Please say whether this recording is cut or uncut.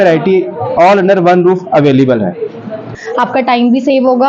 cut